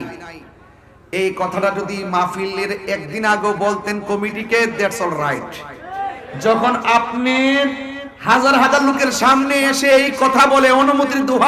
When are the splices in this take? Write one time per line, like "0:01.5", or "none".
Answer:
none